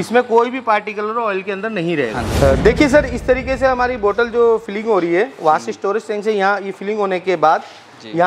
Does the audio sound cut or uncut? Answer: cut